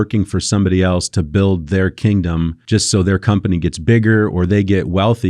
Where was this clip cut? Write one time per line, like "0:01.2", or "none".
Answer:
0:02.6